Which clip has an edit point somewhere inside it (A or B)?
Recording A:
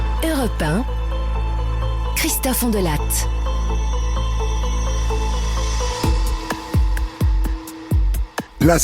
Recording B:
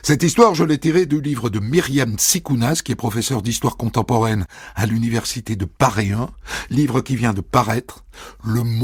A